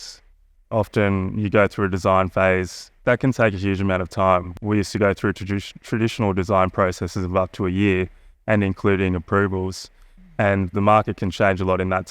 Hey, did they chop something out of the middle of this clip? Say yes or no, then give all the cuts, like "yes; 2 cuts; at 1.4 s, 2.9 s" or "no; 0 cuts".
yes; 2 cuts; at 3.0 s, 4.5 s